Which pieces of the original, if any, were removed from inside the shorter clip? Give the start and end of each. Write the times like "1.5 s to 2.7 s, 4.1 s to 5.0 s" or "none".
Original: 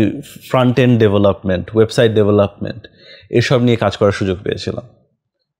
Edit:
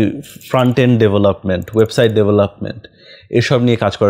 none

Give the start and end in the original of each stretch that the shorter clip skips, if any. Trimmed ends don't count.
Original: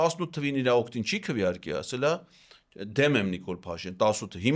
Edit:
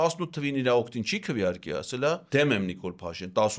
2.2 s to 2.9 s

